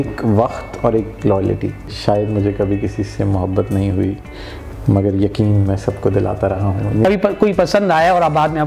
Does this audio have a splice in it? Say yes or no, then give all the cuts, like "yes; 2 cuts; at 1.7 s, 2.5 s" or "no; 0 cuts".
yes; 2 cuts; at 1.9 s, 7.1 s